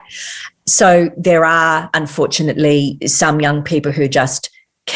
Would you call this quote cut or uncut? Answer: cut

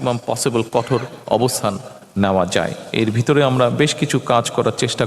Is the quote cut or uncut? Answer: uncut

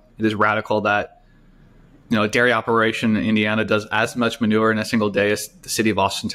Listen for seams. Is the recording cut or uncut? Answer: uncut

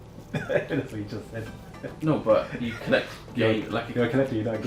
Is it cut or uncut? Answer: uncut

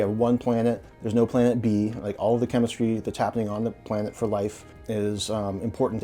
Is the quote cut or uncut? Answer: cut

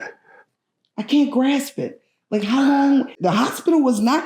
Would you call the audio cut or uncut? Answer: cut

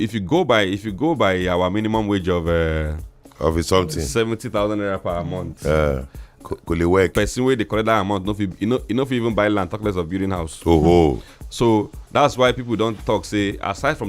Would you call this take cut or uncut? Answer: uncut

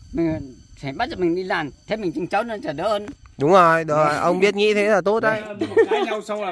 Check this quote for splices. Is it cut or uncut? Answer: cut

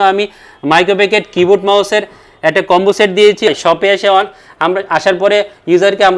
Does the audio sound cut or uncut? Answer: cut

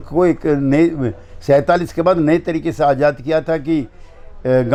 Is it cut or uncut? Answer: uncut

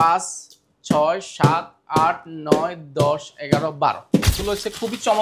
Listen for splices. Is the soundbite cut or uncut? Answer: cut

